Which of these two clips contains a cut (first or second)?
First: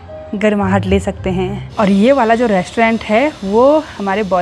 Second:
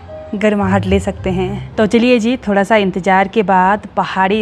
first